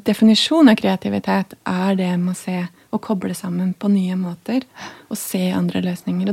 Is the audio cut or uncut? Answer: uncut